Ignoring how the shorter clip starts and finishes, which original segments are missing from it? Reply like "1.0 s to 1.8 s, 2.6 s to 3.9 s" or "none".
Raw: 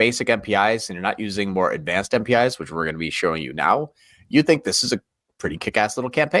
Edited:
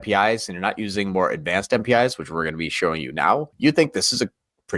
3.9 s to 4.2 s